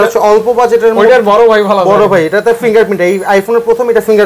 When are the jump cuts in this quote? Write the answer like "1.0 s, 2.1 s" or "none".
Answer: none